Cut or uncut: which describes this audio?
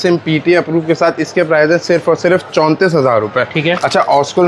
uncut